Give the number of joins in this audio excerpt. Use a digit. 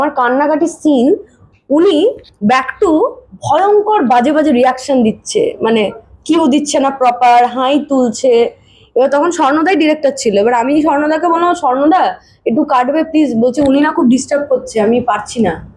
0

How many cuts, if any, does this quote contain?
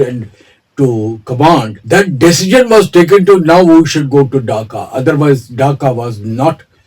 1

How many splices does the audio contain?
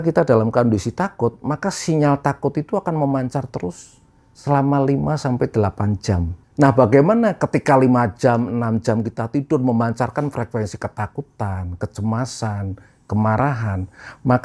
1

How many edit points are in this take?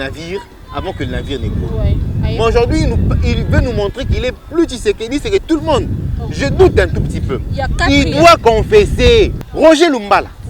1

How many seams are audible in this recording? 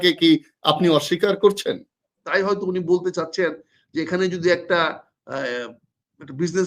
1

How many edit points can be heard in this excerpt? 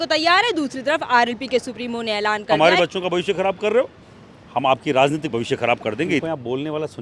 2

